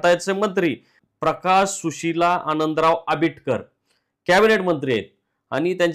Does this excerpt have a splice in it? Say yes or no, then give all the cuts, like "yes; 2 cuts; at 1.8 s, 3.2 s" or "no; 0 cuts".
yes; 1 cut; at 0.9 s